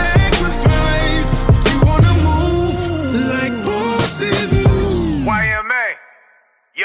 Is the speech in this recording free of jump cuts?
yes; 0 cuts

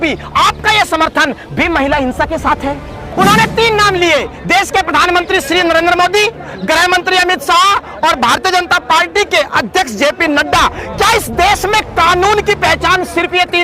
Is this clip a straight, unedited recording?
no; 1 cut; at 3.1 s

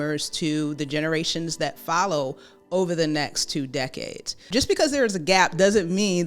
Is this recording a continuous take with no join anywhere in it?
no; 1 cut; at 4.5 s

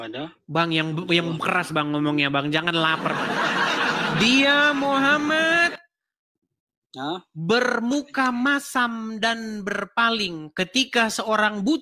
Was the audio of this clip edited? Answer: no; 0 cuts

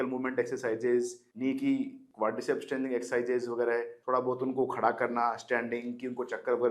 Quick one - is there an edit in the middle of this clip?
no; 0 cuts

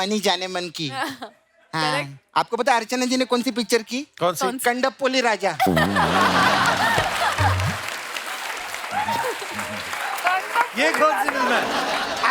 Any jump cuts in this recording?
no; 0 cuts

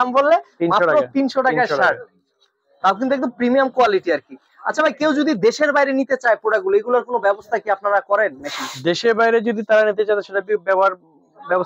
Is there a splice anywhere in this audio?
no; 0 cuts

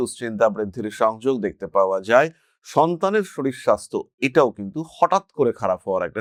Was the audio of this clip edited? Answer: no; 0 cuts

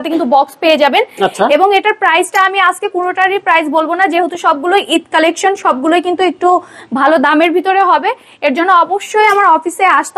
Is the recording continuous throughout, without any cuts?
yes; 0 cuts

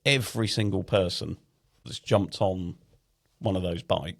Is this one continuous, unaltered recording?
no; 1 cut; at 1.8 s

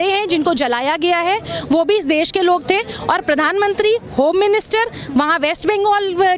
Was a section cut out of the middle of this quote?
no; 0 cuts

